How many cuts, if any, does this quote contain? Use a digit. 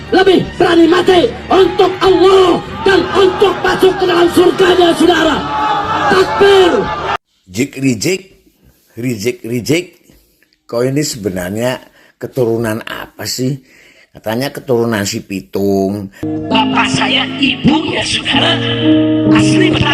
1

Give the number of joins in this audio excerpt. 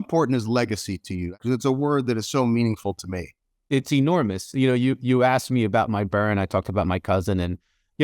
1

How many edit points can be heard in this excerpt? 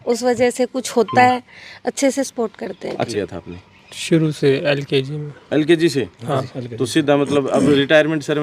1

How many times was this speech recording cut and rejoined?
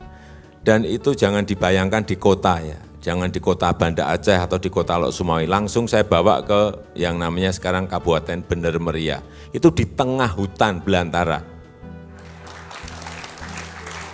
0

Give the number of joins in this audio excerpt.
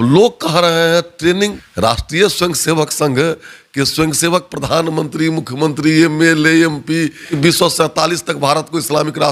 2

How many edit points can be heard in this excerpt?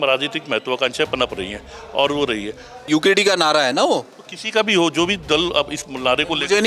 1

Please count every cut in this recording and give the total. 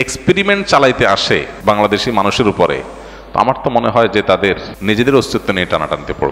2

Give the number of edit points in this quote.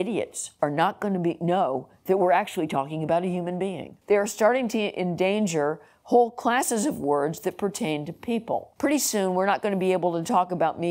2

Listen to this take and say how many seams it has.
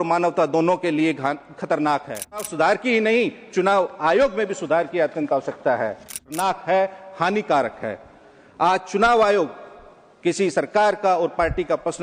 2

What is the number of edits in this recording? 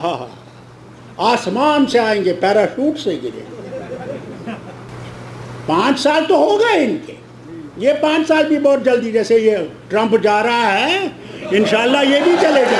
1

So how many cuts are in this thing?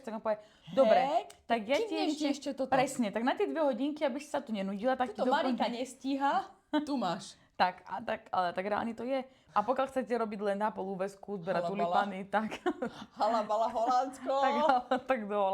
1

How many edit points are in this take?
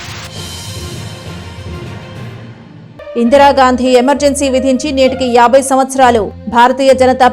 1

